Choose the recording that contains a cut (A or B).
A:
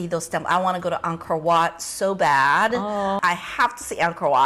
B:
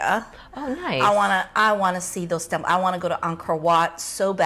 A